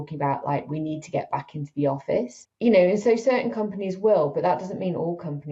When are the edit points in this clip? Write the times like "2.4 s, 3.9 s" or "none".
2.4 s